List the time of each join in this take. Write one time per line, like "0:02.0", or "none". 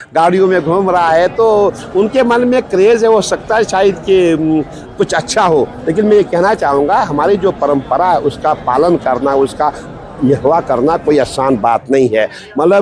none